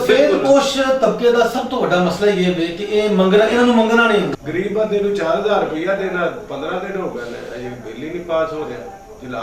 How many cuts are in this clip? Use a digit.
1